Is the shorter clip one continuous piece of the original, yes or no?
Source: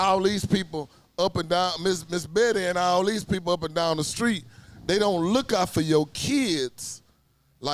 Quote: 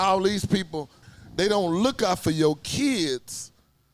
no